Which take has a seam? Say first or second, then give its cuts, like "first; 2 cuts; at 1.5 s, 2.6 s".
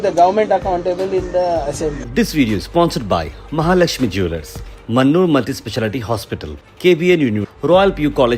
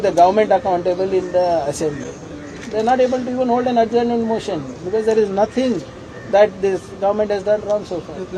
first; 1 cut; at 2.0 s